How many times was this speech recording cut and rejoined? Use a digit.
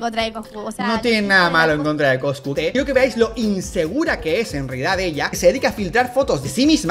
0